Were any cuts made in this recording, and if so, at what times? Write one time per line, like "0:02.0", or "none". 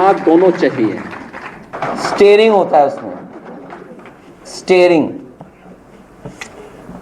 0:01.8